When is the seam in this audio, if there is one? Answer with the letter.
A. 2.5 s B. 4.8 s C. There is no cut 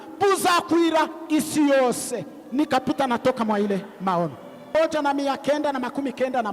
B